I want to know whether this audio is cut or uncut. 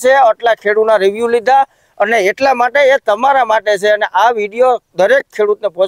cut